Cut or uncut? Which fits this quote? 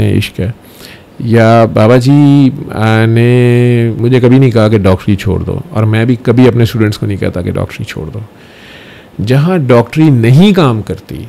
cut